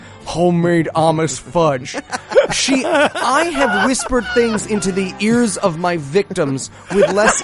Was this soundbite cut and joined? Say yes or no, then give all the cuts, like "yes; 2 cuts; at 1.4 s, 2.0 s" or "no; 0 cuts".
no; 0 cuts